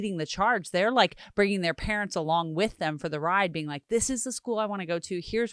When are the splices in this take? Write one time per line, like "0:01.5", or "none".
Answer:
none